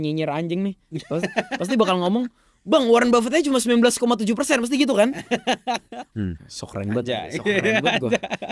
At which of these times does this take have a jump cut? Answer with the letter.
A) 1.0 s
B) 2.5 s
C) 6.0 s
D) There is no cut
C